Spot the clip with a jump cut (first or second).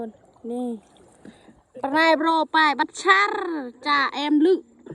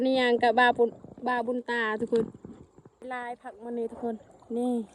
second